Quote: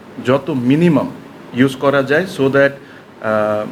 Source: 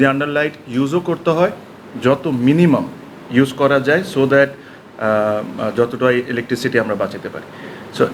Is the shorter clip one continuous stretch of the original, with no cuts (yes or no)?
yes